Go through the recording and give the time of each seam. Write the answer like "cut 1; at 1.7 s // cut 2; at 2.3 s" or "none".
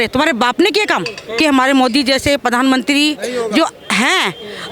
cut 1; at 1.2 s